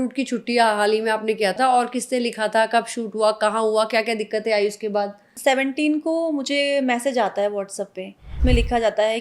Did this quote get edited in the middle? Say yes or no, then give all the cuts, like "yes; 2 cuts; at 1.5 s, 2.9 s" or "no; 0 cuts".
yes; 3 cuts; at 1.6 s, 5.2 s, 8.4 s